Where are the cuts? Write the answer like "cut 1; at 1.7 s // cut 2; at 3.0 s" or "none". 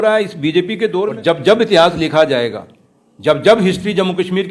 cut 1; at 1.2 s